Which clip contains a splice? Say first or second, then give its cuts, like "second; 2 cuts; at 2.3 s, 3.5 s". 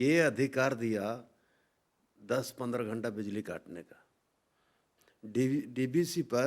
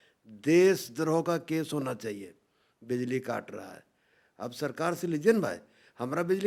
first; 1 cut; at 4.8 s